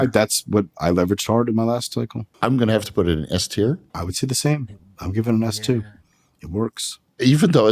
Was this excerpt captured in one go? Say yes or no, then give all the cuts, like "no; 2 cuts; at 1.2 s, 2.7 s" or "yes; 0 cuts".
no; 2 cuts; at 2.2 s, 3.9 s